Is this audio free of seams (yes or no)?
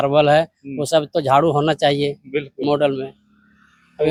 yes